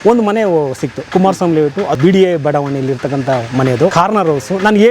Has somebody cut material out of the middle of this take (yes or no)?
yes